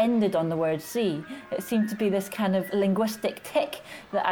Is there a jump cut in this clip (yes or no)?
no